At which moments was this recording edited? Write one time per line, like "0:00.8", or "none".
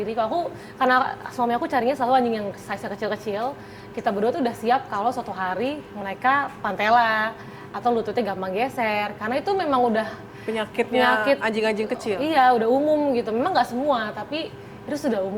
none